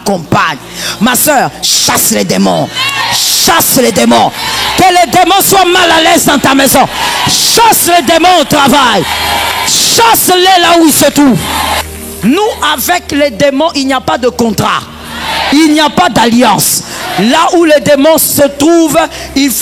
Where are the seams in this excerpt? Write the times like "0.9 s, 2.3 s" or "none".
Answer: 11.8 s